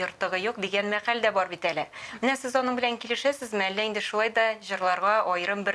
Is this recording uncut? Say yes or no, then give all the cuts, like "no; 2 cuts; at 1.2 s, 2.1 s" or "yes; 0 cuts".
yes; 0 cuts